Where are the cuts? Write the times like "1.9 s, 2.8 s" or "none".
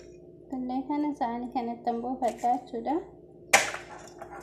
none